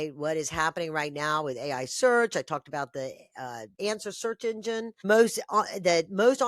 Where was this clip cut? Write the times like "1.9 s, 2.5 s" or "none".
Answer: 3.7 s, 5.0 s